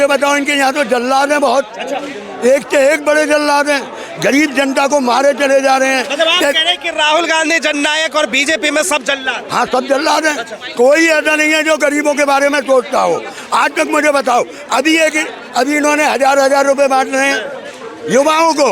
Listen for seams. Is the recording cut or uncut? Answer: uncut